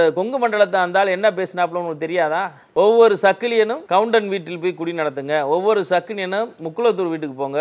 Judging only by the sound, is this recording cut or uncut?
cut